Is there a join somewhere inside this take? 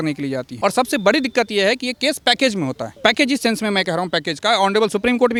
no; 0 cuts

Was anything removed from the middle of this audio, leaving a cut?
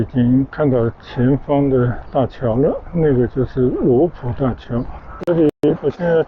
yes; 1 cut; at 5.1 s

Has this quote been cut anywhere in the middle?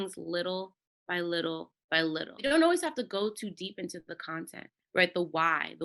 yes; 1 cut; at 2.4 s

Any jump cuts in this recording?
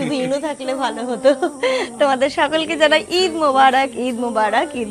no; 0 cuts

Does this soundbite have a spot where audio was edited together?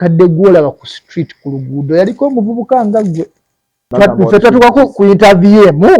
yes; 1 cut; at 3.8 s

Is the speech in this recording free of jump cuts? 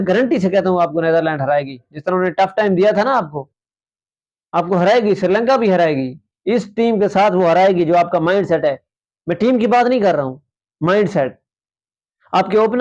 yes; 0 cuts

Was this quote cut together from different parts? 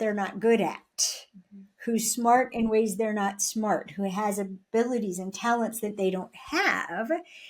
no; 0 cuts

